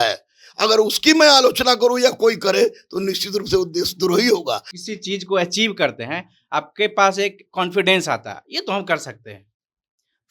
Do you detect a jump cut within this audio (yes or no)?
yes